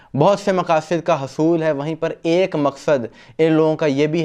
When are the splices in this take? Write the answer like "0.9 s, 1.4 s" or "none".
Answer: none